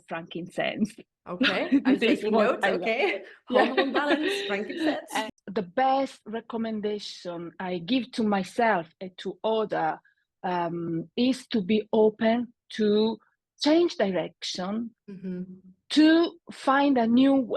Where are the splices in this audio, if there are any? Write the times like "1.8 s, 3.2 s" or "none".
5.1 s